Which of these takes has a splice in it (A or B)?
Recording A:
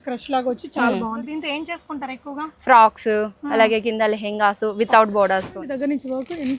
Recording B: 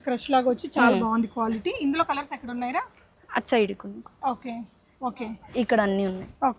A